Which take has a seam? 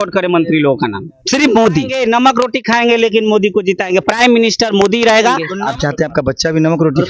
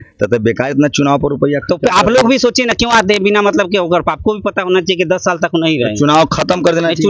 first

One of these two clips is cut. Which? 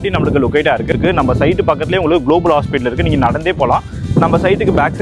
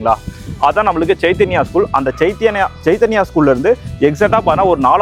first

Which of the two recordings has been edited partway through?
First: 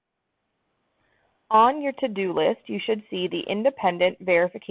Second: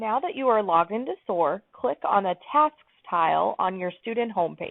second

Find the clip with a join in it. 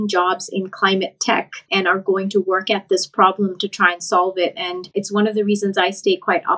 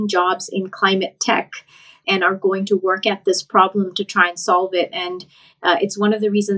first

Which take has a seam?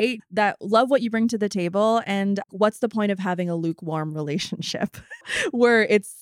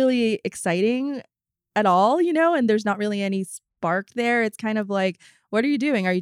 first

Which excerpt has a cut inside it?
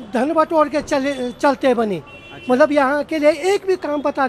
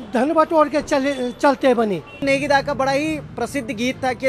second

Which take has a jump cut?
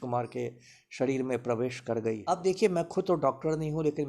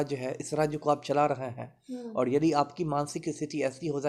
first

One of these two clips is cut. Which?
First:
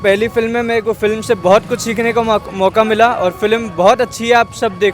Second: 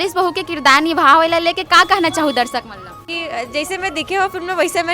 second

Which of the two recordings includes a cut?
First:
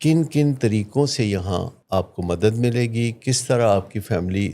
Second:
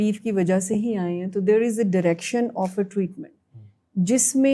first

